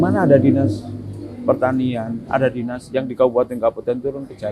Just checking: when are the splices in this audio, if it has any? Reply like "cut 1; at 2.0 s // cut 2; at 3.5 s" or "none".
none